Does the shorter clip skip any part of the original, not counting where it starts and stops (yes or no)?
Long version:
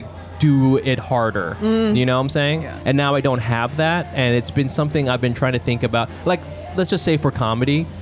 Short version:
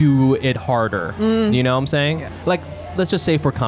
yes